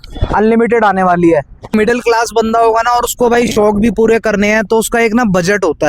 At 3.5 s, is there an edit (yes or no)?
no